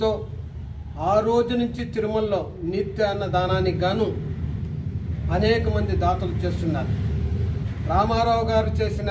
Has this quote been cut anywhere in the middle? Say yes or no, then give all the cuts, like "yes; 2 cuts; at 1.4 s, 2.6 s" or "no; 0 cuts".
no; 0 cuts